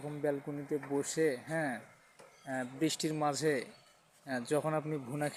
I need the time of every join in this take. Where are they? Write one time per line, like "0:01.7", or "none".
none